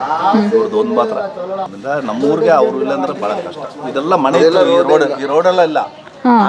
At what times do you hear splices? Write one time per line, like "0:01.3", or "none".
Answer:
0:01.6